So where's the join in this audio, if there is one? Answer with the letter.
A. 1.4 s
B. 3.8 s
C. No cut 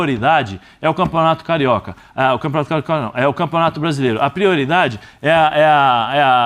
C